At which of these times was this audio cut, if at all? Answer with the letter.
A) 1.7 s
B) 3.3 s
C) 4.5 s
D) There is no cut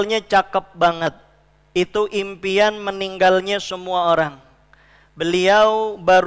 D